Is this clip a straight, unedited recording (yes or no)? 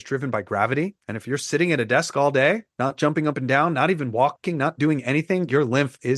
no